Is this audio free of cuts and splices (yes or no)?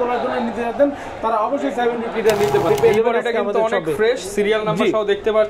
no